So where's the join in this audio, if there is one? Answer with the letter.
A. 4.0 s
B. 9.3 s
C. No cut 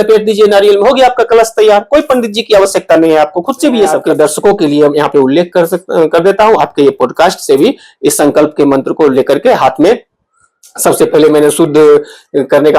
A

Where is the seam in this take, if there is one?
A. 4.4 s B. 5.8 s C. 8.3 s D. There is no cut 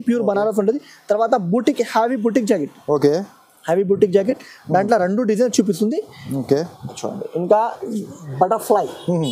C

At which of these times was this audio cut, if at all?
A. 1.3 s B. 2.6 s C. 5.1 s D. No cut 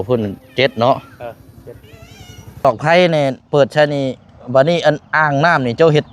B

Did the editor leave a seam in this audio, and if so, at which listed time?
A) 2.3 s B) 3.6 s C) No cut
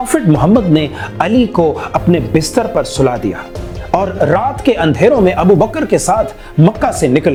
C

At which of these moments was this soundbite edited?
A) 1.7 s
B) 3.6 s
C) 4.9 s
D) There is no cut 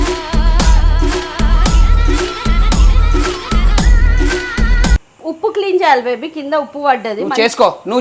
C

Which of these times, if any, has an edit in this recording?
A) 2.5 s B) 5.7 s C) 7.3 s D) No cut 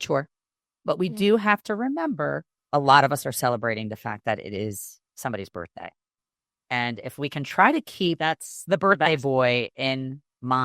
A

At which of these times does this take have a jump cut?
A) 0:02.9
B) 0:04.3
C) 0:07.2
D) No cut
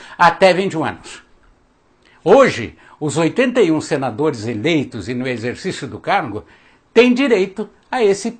A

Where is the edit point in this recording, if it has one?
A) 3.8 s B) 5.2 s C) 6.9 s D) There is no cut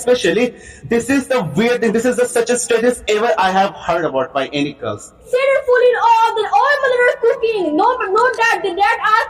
B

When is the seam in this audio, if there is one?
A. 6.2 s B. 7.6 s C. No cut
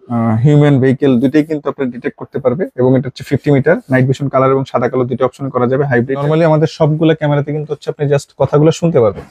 A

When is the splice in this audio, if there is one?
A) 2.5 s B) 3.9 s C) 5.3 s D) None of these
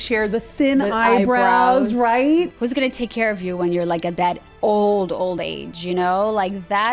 A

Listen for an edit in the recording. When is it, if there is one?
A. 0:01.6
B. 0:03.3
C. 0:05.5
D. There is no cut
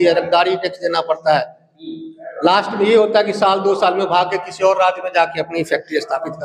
D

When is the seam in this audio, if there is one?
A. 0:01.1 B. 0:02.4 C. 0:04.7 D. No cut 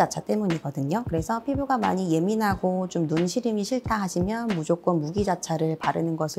D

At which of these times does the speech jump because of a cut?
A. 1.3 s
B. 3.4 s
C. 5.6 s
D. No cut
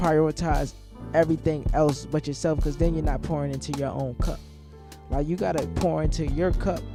D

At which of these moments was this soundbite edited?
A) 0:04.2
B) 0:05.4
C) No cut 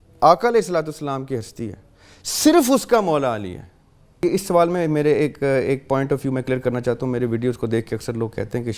A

